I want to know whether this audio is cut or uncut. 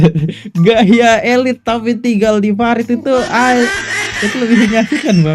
uncut